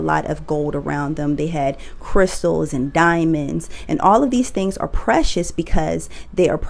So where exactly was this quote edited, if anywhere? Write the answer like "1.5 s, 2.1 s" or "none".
none